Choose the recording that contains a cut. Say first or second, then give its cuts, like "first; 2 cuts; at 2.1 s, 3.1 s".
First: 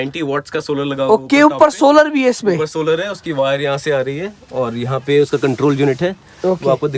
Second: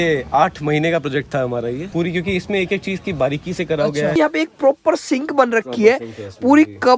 second; 1 cut; at 4.1 s